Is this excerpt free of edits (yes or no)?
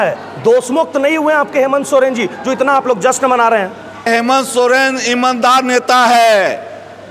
no